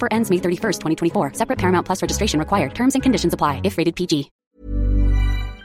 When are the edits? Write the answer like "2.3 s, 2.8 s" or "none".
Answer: 4.4 s

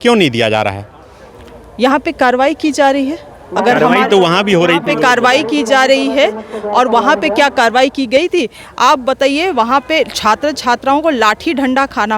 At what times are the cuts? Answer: none

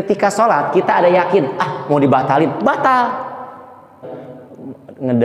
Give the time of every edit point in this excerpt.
4.0 s

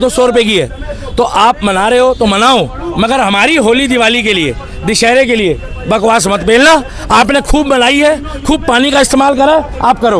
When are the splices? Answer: none

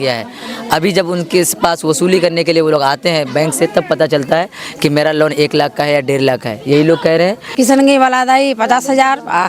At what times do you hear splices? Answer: 7.5 s

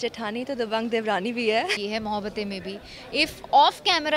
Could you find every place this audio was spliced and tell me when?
1.8 s

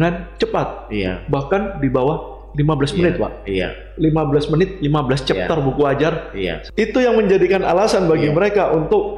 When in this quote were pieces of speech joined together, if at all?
6.5 s

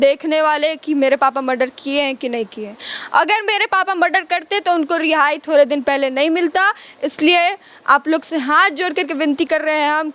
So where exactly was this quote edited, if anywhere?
none

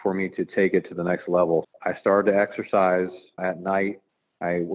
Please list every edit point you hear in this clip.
1.7 s, 3.4 s

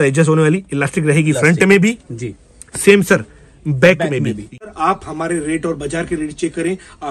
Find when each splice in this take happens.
4.7 s

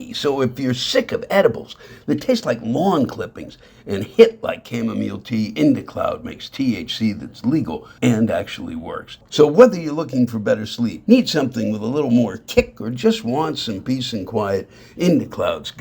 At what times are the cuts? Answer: 7.8 s, 9.2 s, 11.0 s

